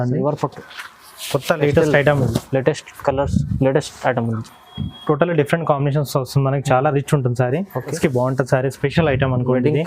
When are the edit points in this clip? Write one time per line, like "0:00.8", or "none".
0:08.0